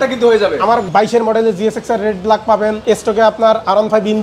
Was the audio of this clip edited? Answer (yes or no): yes